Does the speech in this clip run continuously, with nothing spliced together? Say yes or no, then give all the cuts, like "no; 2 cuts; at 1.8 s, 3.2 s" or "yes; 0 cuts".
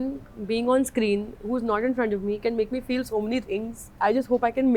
no; 1 cut; at 3.8 s